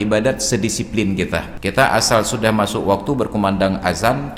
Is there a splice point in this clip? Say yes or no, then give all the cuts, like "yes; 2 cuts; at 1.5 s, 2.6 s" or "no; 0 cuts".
yes; 1 cut; at 1.5 s